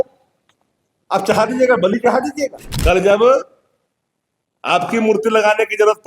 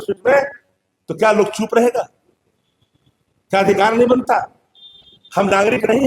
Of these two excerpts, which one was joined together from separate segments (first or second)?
first